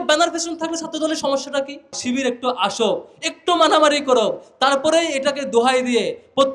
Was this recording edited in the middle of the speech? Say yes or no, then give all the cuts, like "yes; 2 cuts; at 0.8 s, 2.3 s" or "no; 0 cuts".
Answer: yes; 1 cut; at 2.0 s